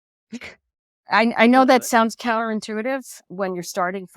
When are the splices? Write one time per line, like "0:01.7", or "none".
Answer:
0:03.2